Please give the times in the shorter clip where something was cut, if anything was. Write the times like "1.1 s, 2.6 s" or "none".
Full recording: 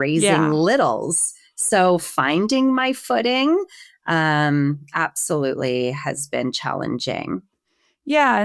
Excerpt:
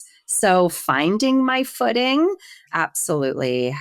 2.6 s